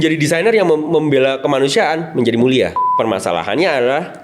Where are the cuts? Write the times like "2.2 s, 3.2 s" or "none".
2.8 s